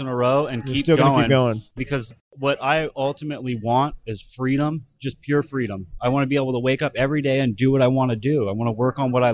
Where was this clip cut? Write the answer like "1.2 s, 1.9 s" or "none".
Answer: 1.8 s